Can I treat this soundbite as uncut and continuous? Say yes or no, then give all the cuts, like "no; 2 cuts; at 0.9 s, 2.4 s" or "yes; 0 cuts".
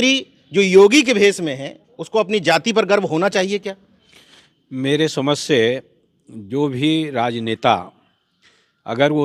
yes; 0 cuts